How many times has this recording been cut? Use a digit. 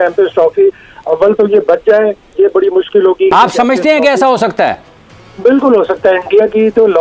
1